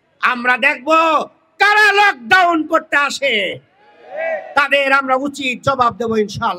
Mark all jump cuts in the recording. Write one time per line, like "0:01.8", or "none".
none